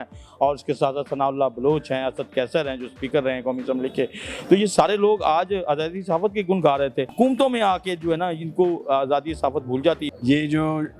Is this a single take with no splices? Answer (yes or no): no